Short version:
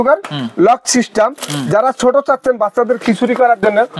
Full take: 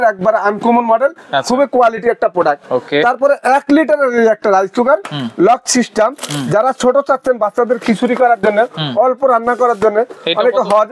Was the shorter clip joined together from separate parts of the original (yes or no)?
no